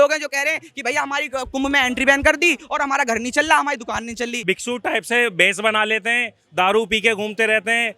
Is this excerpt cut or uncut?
cut